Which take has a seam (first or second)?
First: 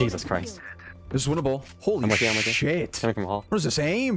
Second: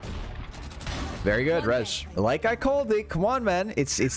second